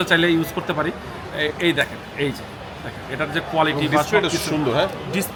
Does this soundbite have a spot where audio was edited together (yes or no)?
no